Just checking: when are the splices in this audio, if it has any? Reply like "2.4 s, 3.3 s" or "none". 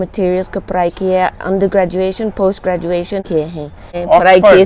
3.6 s